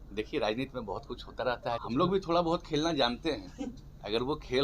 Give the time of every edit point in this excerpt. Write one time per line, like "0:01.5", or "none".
0:01.8